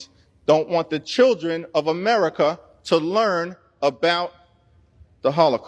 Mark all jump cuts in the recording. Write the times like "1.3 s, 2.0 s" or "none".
none